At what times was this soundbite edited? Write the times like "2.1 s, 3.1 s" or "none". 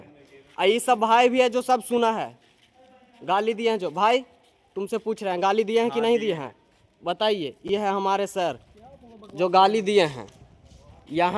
none